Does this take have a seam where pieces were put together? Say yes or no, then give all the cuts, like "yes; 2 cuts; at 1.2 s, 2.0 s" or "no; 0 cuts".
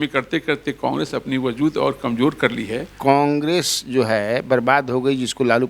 yes; 1 cut; at 2.9 s